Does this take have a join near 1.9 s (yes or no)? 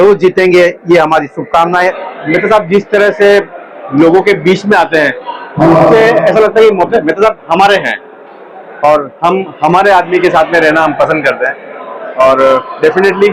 yes